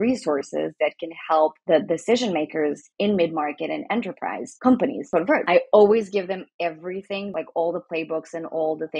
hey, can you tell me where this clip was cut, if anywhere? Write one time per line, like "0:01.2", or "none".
0:05.3
0:07.3